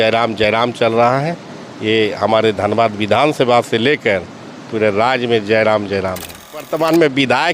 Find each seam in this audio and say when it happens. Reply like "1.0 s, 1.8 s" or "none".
6.5 s